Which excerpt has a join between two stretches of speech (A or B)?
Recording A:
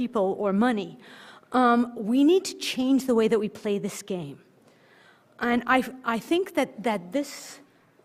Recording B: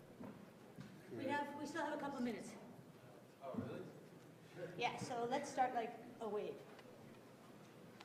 A